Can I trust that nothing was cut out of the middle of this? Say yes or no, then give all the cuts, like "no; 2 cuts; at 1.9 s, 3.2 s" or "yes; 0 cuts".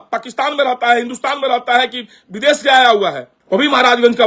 yes; 0 cuts